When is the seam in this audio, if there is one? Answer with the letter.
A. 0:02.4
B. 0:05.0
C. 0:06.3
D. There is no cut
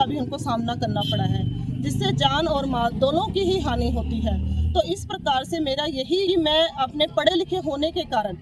C